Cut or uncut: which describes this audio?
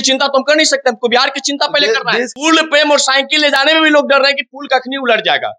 cut